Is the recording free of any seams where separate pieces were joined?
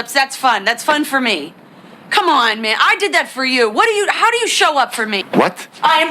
no; 1 cut; at 5.2 s

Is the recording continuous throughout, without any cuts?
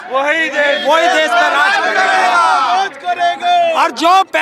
yes; 0 cuts

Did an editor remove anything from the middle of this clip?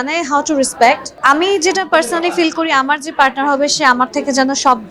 yes; 1 cut; at 1.1 s

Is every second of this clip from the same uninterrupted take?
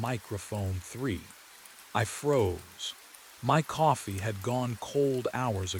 yes; 0 cuts

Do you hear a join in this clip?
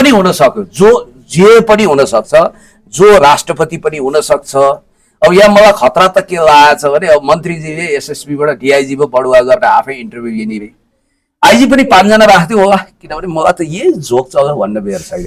no; 0 cuts

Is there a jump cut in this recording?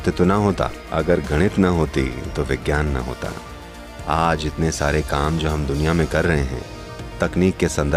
no; 0 cuts

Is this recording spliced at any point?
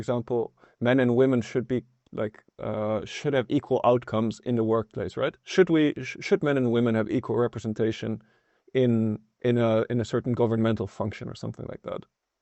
no; 0 cuts

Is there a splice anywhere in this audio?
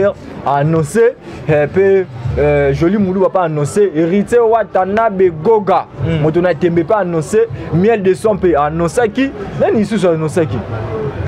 no; 0 cuts

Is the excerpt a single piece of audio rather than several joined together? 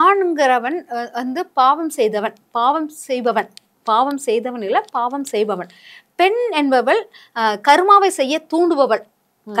yes; 0 cuts

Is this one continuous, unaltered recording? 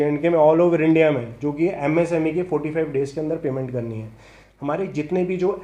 yes; 0 cuts

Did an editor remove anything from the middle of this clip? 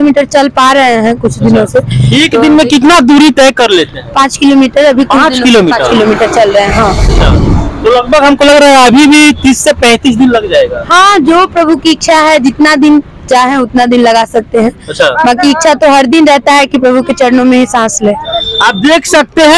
no; 0 cuts

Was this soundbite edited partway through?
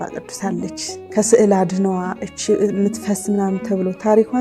yes; 1 cut; at 1.0 s

